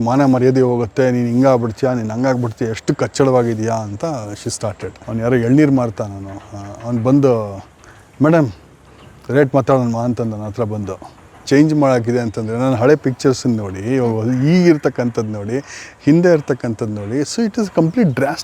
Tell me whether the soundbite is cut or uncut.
cut